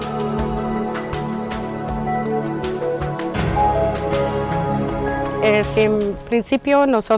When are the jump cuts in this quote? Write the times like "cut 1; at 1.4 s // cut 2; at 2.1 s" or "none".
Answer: cut 1; at 5.7 s